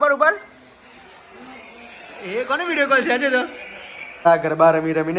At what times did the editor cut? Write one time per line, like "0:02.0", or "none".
0:04.2